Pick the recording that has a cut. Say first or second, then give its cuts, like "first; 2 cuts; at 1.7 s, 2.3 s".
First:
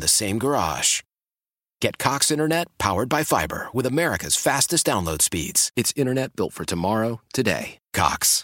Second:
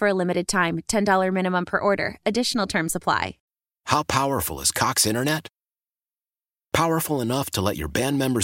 second; 1 cut; at 3.4 s